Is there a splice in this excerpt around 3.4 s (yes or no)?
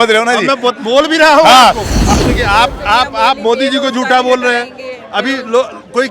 no